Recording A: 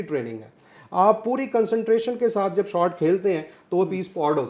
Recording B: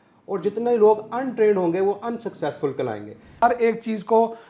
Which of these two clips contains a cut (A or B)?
B